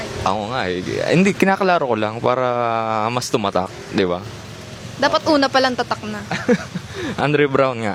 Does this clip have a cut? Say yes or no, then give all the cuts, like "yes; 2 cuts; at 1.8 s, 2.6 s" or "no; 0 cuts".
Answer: no; 0 cuts